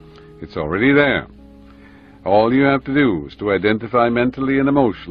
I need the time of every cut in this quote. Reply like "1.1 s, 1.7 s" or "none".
4.2 s